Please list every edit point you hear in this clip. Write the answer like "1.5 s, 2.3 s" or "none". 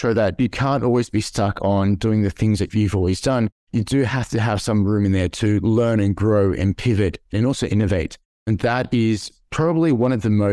none